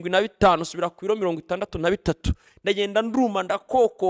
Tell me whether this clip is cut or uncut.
uncut